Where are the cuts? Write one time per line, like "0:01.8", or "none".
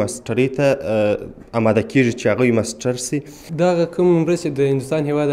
0:03.4